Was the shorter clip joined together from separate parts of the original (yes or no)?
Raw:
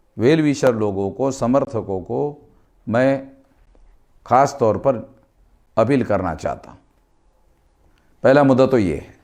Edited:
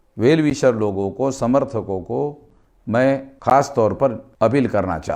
yes